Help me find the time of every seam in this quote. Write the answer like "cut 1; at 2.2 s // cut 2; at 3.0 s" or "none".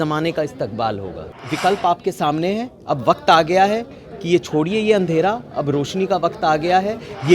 cut 1; at 1.4 s